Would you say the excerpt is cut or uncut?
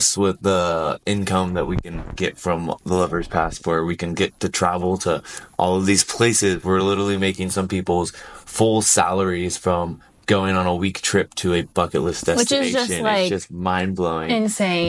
uncut